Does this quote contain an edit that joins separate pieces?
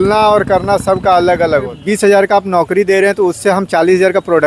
yes; 1 cut; at 1.8 s

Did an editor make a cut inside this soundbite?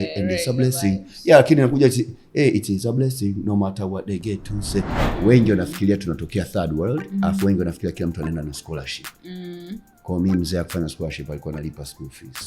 yes; 1 cut; at 5.0 s

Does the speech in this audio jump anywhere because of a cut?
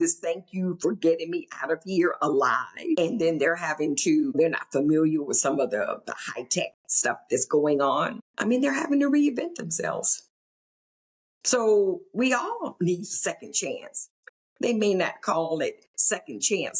yes; 3 cuts; at 3.0 s, 4.3 s, 8.2 s

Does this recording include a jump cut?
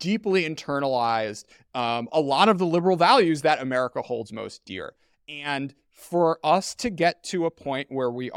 no; 0 cuts

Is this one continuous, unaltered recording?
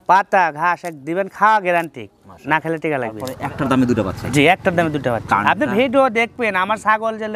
no; 1 cut; at 3.2 s

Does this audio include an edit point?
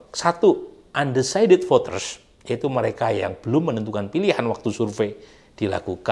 no; 0 cuts

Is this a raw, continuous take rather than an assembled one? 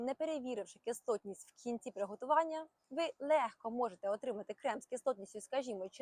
yes; 0 cuts

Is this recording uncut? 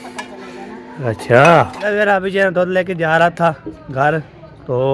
no; 1 cut; at 1.8 s

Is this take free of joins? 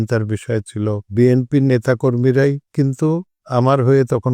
no; 2 cuts; at 1.1 s, 3.4 s

